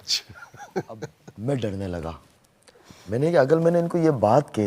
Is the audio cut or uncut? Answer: cut